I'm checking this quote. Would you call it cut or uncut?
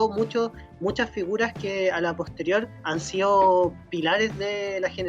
cut